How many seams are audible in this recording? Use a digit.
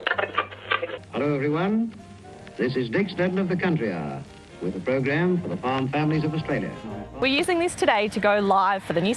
2